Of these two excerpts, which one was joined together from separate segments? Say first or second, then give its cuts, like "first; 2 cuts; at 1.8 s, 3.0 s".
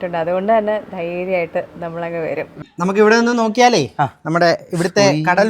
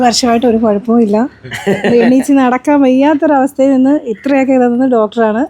first; 1 cut; at 2.7 s